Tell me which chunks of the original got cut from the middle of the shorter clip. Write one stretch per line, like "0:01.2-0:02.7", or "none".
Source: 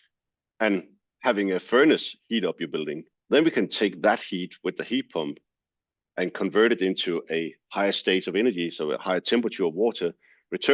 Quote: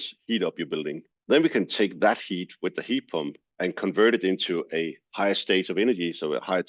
0:05.4-0:06.0

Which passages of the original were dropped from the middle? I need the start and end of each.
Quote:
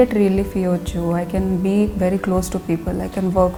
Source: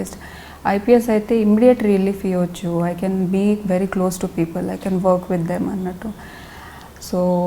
none

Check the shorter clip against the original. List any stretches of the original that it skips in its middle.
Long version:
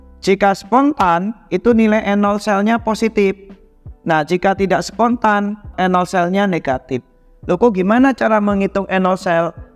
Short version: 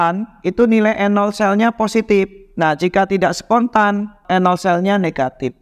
0:03.5-0:03.9

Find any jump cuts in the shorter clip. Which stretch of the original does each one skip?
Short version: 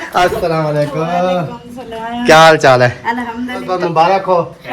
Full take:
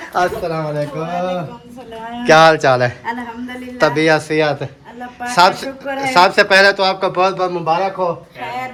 0:03.7-0:07.4

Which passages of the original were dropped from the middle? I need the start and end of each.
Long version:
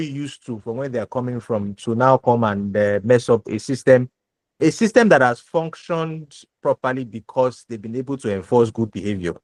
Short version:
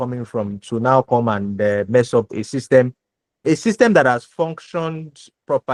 none

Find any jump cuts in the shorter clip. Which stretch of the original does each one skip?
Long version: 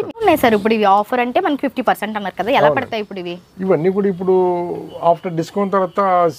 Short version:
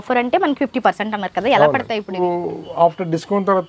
0:03.2-0:04.5

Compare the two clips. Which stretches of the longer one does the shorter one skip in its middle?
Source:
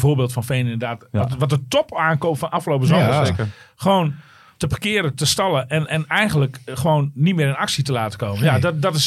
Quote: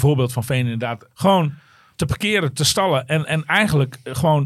0:01.0-0:03.6

